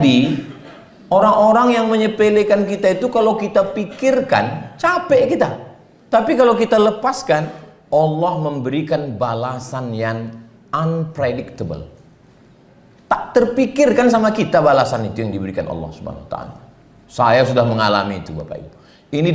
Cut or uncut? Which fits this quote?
uncut